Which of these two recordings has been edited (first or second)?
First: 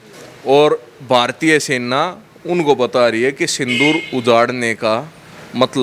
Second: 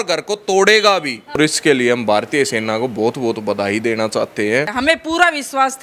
second